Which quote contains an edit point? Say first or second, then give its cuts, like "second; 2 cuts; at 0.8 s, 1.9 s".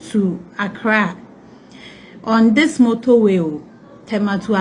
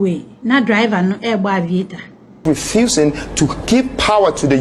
second; 1 cut; at 2.4 s